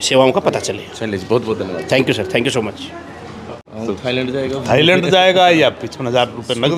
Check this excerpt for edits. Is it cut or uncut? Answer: uncut